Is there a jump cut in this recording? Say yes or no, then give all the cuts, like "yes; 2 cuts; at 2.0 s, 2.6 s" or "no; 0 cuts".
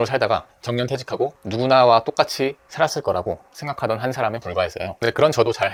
no; 0 cuts